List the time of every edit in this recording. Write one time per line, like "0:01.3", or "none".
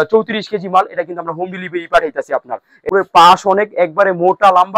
0:02.9